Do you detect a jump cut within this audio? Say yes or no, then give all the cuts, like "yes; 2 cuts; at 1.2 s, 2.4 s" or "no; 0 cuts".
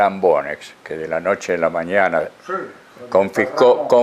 no; 0 cuts